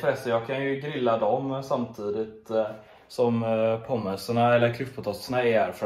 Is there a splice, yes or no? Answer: no